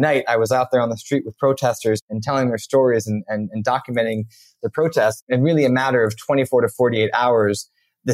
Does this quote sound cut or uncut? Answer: cut